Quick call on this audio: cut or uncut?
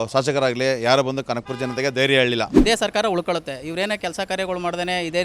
cut